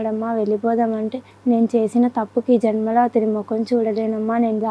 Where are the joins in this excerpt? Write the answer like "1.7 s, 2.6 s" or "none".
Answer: 1.2 s